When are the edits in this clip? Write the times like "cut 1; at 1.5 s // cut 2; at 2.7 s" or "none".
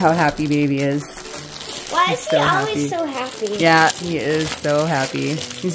none